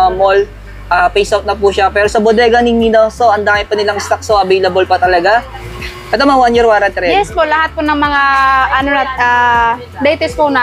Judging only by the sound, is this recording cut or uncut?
cut